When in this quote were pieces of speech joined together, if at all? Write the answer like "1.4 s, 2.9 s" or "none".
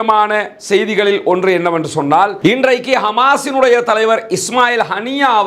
none